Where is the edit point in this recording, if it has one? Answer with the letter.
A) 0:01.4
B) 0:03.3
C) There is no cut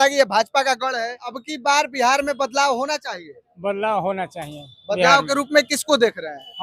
A